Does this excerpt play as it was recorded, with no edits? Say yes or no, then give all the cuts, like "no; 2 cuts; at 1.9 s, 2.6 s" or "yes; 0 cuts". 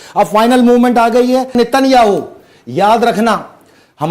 no; 1 cut; at 1.5 s